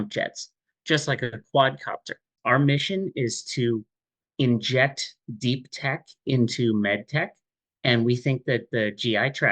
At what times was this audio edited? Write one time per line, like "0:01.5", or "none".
0:02.3